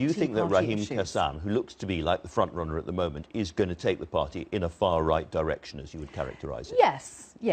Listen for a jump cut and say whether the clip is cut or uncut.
cut